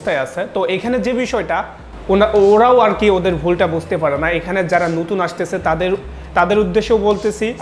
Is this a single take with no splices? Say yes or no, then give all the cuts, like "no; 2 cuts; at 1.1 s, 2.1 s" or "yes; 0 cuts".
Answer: yes; 0 cuts